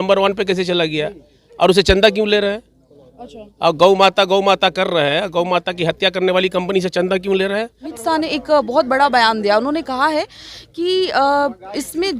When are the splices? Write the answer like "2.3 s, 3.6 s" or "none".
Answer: 7.9 s